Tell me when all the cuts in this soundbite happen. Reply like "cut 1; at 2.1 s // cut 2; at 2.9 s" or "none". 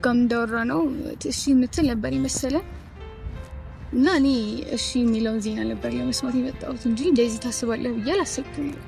none